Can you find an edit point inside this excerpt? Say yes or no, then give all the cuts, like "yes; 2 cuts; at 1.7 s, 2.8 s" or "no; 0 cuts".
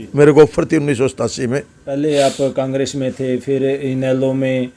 yes; 1 cut; at 1.8 s